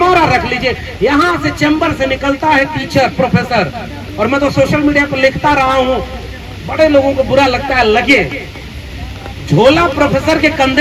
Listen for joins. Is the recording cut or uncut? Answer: uncut